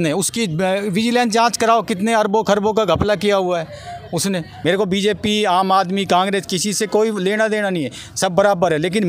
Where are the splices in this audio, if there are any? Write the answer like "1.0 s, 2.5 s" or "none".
4.5 s